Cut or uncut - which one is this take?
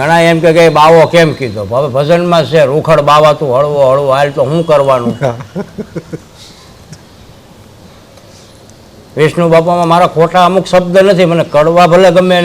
uncut